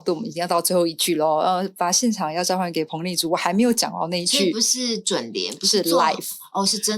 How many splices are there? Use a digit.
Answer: 0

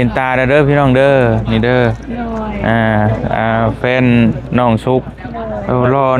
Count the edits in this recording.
0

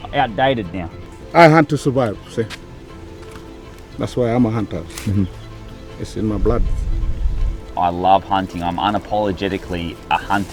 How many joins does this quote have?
2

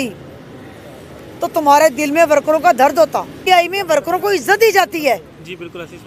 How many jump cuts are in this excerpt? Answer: 1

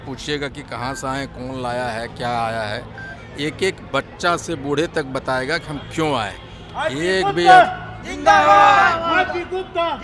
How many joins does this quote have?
0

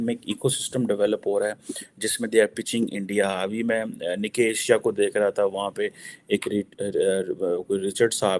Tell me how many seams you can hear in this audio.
0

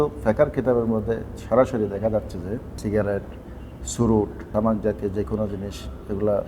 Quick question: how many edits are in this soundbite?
2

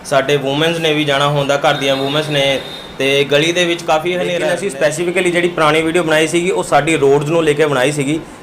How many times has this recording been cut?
1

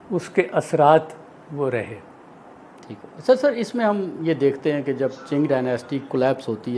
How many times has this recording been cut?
0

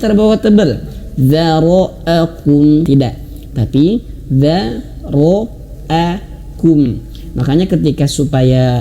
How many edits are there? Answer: 1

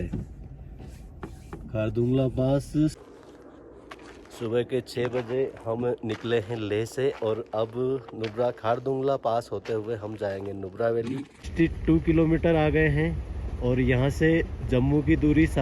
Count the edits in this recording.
2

